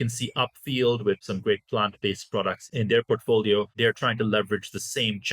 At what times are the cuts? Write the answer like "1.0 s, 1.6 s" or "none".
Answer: 1.2 s, 2.6 s, 3.7 s